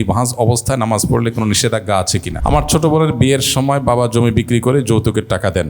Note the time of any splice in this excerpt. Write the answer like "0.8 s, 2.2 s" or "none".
2.3 s